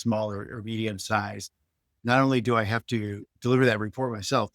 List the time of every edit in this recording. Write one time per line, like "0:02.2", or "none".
0:01.8